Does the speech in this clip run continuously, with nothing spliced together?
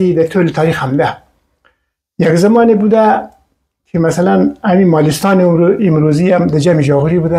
yes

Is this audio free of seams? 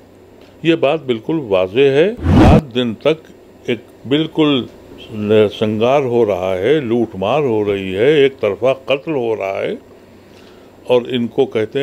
no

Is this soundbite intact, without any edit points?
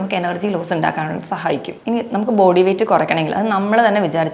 no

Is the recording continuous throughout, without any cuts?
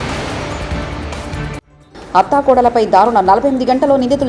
no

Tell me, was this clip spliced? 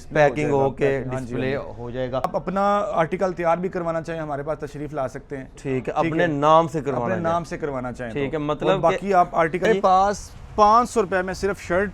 yes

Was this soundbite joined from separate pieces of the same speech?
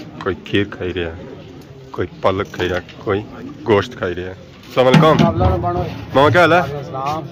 no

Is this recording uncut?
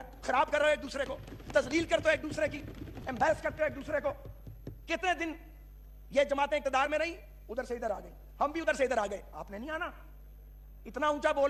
yes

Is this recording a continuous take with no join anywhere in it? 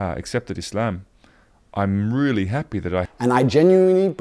no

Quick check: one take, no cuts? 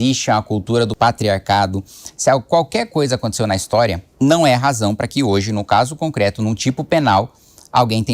no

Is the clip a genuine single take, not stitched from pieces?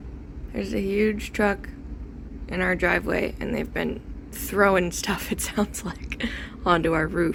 yes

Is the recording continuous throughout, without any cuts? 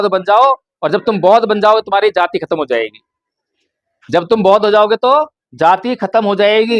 yes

